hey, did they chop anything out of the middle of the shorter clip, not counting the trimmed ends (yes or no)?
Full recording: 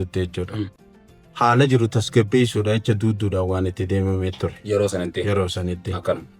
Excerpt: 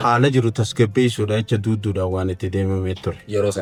no